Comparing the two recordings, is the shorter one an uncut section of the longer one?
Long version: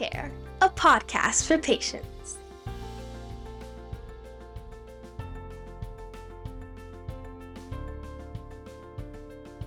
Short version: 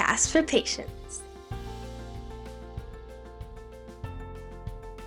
yes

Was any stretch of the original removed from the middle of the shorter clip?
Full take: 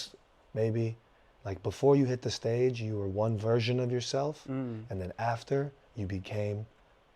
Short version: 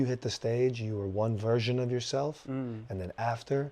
no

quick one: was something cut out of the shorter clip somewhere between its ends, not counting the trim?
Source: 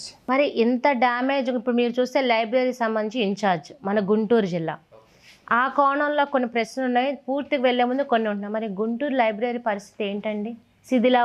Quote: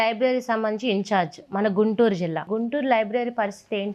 yes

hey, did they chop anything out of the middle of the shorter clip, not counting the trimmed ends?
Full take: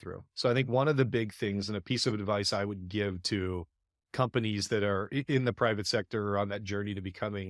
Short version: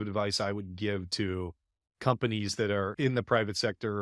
yes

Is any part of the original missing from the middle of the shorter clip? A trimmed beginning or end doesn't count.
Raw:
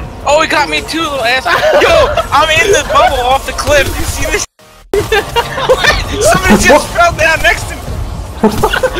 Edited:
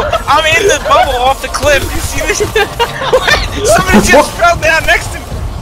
yes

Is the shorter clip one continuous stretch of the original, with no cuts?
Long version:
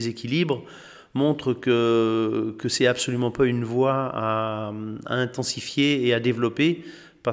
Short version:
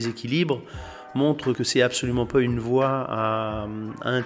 no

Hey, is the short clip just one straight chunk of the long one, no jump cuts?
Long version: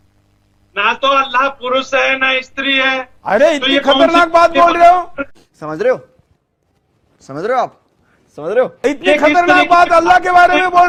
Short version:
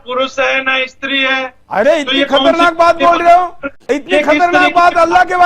no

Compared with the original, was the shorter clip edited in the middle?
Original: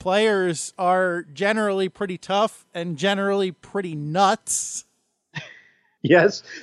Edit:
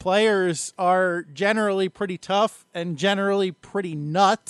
no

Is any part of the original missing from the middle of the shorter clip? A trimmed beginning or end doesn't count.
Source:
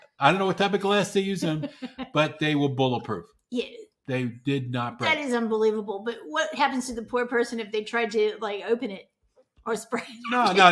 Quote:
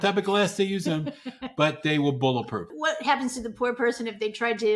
yes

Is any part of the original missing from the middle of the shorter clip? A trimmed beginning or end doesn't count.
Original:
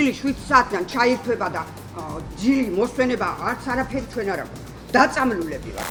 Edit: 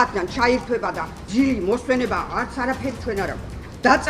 yes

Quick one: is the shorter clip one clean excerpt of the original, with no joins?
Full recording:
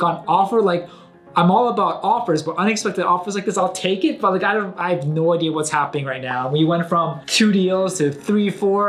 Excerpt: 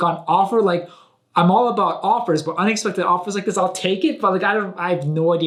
yes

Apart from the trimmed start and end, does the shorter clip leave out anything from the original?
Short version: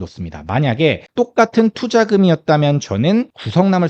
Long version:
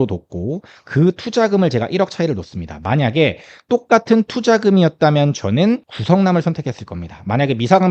yes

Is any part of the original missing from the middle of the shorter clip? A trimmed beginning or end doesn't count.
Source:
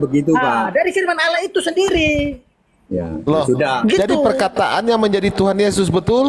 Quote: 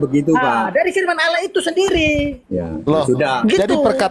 yes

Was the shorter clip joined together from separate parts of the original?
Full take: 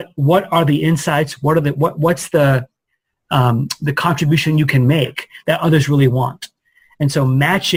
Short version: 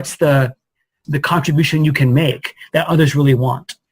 yes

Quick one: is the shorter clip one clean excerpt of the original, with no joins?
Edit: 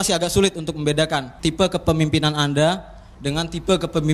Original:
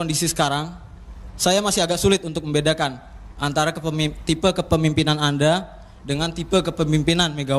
no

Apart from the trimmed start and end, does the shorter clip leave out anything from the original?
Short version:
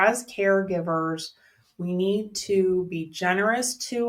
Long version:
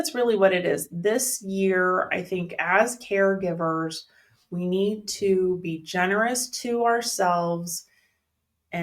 no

